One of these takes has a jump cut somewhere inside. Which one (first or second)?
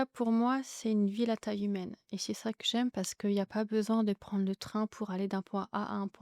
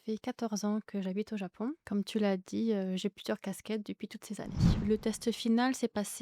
second